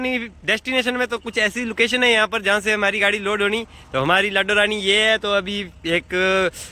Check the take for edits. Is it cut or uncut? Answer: uncut